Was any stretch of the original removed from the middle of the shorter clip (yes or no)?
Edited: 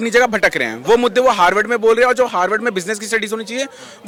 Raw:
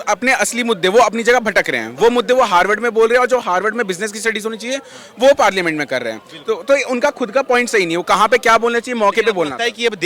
no